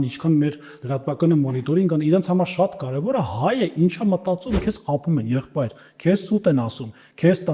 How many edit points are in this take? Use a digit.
1